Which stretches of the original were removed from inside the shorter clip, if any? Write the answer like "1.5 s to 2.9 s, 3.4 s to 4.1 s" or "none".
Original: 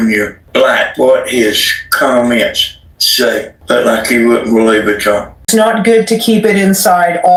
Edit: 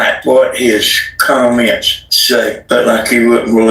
3.1 s to 3.4 s